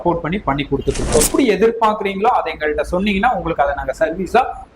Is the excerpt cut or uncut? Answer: cut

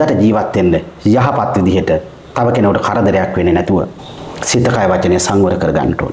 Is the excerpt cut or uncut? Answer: uncut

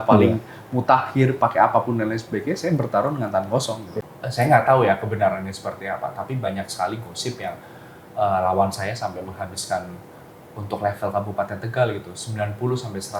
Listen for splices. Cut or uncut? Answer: cut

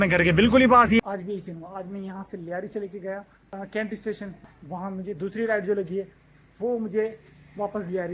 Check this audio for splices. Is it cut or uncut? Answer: cut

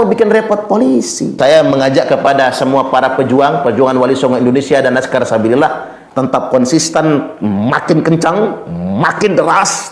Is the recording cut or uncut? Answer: cut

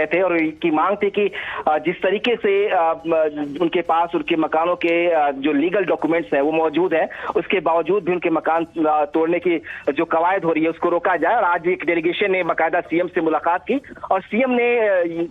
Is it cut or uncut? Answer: uncut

